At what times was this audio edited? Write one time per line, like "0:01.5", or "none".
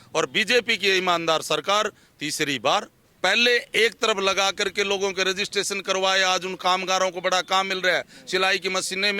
0:03.0